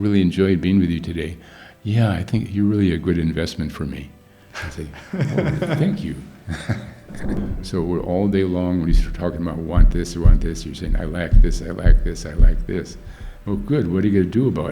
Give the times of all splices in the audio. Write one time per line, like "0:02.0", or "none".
0:07.4